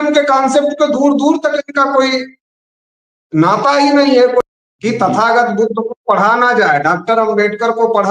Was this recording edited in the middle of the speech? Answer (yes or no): yes